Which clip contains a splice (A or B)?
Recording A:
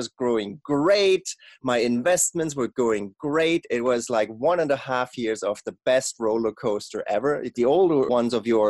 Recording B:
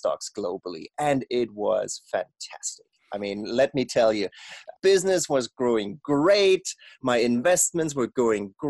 A